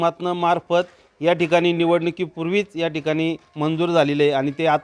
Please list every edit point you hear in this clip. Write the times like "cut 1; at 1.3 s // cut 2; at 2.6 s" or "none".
none